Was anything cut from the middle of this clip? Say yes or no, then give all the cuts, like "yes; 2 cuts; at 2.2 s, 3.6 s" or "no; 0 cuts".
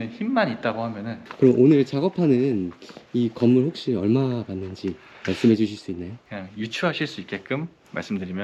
yes; 2 cuts; at 1.2 s, 6.2 s